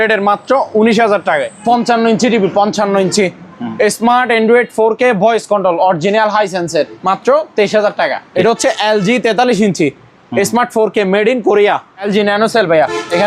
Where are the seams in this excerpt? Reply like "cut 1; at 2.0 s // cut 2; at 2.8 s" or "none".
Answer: cut 1; at 1.5 s // cut 2; at 7.0 s // cut 3; at 8.2 s // cut 4; at 12.0 s